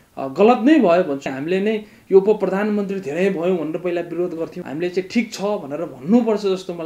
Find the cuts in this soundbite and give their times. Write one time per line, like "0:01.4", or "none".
0:01.3
0:04.6